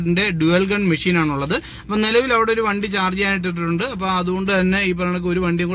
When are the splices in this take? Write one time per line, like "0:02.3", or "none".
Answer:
none